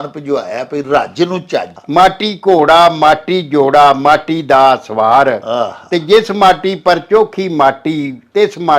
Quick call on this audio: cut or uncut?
cut